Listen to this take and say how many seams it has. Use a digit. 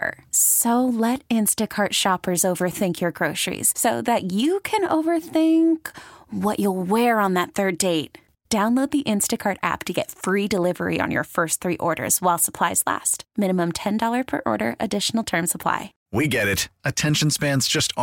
1